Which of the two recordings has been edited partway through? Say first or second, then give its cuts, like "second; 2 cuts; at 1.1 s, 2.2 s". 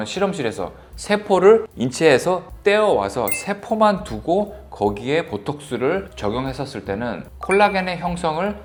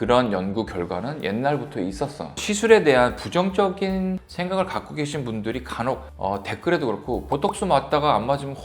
second; 1 cut; at 2.4 s